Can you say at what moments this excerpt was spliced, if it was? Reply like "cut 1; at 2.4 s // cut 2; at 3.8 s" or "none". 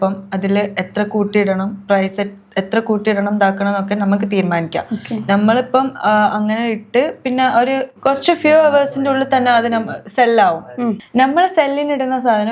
none